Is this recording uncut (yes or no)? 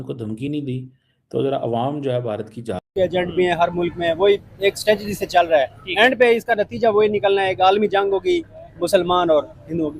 no